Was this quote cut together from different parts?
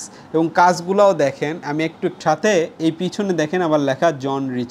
yes; 1 cut; at 2.2 s

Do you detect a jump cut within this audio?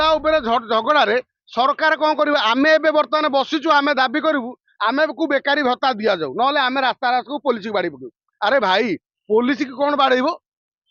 no; 0 cuts

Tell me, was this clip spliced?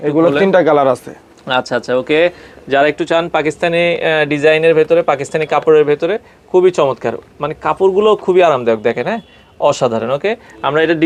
no; 0 cuts

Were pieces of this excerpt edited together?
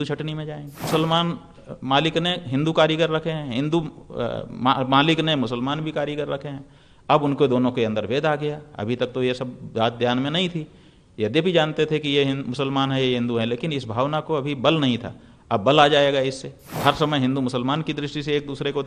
yes; 2 cuts; at 0.9 s, 16.8 s

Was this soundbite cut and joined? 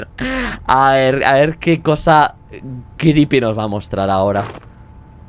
no; 0 cuts

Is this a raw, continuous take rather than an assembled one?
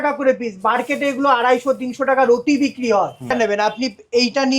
no; 1 cut; at 3.3 s

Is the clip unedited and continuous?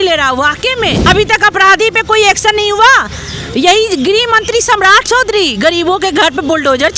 no; 1 cut; at 1.0 s

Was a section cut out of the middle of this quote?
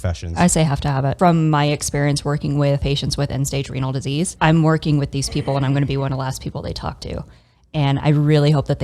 yes; 3 cuts; at 1.1 s, 2.8 s, 4.3 s

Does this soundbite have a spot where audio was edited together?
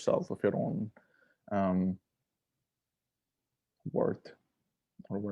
no; 0 cuts

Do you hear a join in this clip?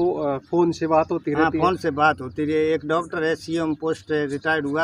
no; 0 cuts

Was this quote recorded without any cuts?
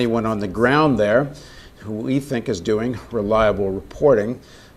no; 1 cut; at 2.4 s

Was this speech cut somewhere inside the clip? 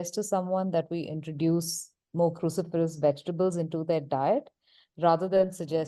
no; 0 cuts

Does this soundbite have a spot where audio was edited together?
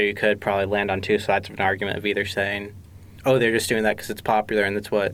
no; 0 cuts

